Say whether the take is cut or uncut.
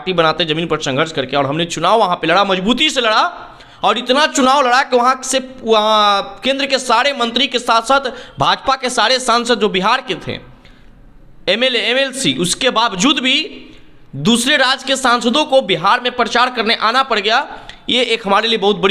uncut